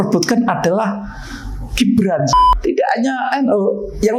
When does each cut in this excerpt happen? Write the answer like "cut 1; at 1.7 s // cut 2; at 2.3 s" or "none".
cut 1; at 2.3 s